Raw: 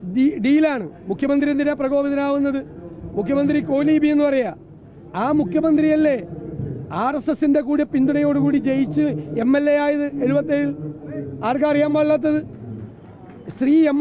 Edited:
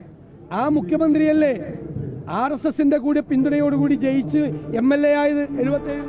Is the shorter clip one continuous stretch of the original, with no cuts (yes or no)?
yes